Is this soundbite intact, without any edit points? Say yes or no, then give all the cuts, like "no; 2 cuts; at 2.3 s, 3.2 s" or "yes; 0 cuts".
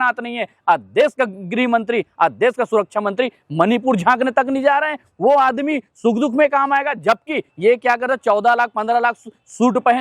no; 1 cut; at 7.5 s